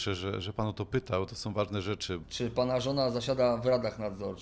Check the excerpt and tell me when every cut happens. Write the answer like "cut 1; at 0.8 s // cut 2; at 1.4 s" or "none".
cut 1; at 2.2 s